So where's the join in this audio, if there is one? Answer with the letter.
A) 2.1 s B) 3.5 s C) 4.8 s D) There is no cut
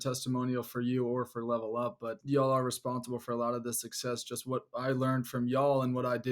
A